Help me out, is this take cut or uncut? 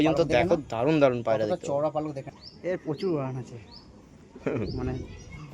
cut